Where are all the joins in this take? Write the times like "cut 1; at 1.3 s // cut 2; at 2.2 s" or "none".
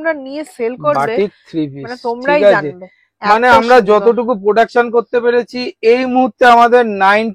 none